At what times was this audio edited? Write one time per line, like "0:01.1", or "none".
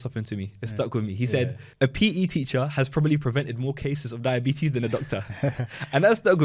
0:01.6